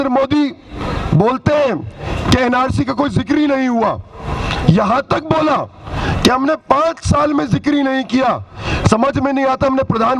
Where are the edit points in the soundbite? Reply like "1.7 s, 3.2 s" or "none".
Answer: none

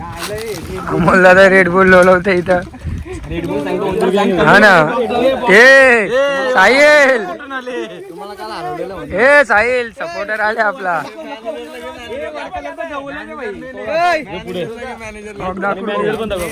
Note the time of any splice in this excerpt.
none

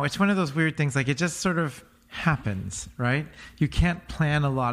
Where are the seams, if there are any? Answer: none

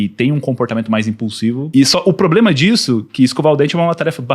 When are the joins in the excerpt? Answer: 1.7 s

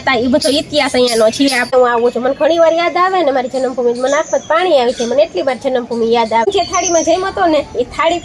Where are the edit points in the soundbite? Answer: 1.7 s, 6.5 s

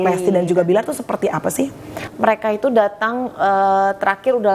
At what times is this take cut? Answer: 2.0 s

